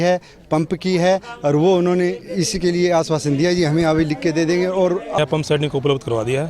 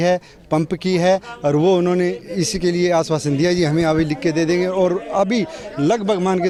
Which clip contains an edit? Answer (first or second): first